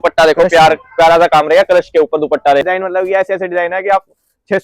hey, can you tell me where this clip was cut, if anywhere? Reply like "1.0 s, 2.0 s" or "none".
2.6 s